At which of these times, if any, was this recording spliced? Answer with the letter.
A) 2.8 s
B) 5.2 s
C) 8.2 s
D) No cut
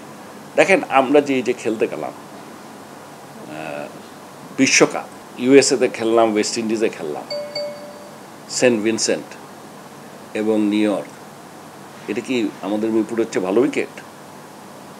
B